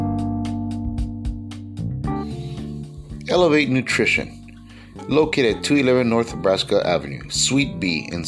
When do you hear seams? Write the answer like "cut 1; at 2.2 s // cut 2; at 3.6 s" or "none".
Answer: cut 1; at 2.8 s